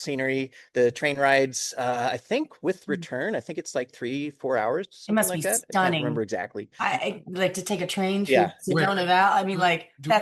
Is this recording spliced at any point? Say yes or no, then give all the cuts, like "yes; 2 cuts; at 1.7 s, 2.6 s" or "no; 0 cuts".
no; 0 cuts